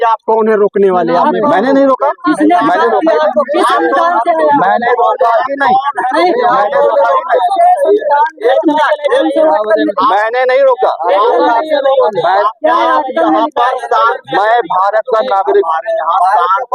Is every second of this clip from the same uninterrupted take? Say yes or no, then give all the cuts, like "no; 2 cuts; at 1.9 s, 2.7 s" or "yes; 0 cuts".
yes; 0 cuts